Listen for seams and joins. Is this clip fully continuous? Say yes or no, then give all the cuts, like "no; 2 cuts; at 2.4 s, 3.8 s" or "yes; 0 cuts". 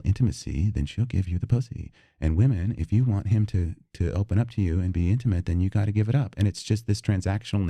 yes; 0 cuts